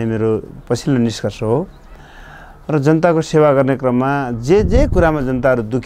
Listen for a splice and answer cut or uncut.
uncut